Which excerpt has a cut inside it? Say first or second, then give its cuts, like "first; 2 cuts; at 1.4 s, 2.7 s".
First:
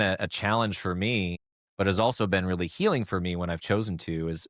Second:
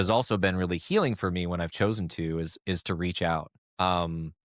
second; 1 cut; at 3.6 s